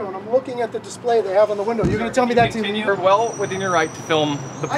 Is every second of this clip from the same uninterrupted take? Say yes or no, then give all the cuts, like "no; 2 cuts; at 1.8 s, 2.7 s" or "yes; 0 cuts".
no; 1 cut; at 2.9 s